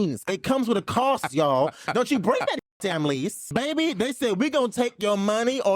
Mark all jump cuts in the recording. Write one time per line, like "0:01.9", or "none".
0:03.4